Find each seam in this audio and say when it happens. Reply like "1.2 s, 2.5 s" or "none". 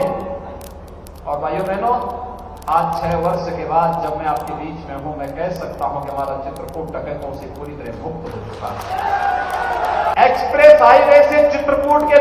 10.1 s